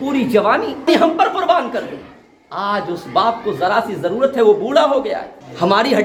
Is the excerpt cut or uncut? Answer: uncut